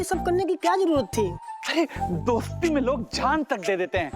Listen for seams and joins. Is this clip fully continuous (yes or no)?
yes